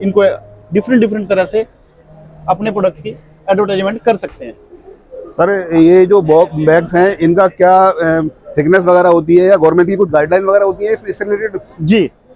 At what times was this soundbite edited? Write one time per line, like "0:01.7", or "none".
none